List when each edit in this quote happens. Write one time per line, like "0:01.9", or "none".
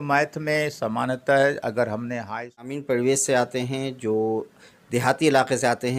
0:02.8